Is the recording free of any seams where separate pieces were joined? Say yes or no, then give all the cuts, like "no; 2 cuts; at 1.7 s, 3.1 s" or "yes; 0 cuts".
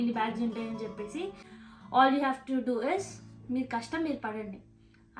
no; 1 cut; at 1.5 s